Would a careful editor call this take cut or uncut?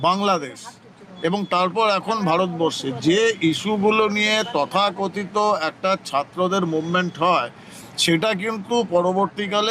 uncut